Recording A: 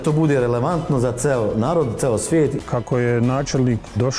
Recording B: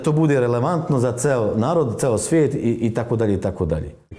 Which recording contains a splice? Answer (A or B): A